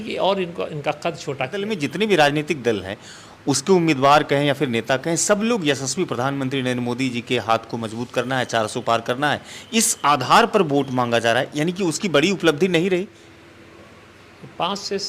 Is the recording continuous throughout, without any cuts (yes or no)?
no